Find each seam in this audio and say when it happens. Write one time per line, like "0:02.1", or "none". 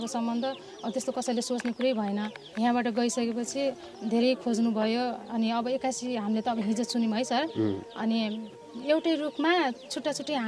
0:02.4
0:08.7